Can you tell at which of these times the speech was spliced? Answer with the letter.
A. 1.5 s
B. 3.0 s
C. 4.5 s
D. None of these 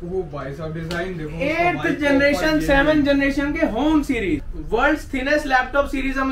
C